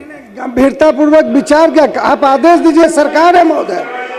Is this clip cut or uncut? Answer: uncut